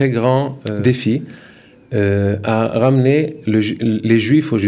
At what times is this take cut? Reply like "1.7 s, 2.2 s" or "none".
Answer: none